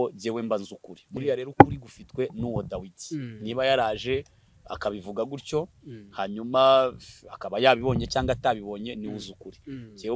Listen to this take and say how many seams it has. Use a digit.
0